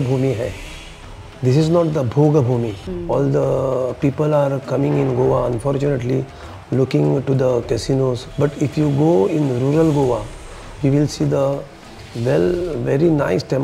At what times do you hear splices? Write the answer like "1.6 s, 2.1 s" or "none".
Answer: 2.8 s, 8.2 s